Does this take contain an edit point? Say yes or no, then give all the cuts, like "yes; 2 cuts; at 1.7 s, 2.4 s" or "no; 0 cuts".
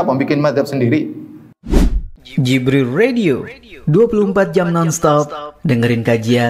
yes; 1 cut; at 1.5 s